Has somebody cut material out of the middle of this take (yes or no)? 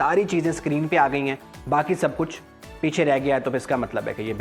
no